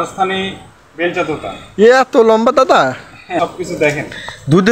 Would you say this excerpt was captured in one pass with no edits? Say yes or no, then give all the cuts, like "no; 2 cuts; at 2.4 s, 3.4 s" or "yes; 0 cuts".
no; 1 cut; at 3.3 s